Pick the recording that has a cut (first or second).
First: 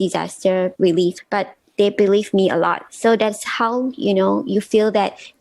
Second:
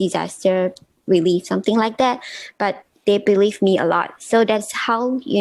first